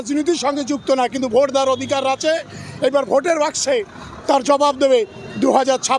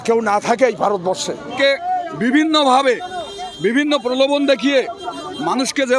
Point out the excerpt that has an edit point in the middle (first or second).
second